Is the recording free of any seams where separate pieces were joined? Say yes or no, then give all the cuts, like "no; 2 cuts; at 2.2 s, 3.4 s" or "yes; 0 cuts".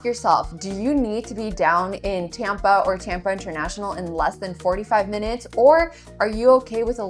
yes; 0 cuts